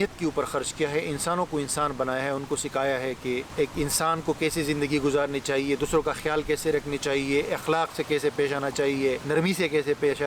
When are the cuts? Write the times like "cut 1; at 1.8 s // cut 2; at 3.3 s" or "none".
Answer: cut 1; at 3.5 s // cut 2; at 9.2 s